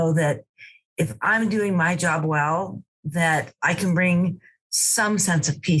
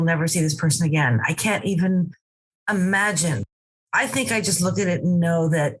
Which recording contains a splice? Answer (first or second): second